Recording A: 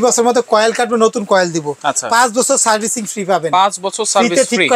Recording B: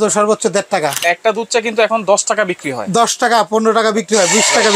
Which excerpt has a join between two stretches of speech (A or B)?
B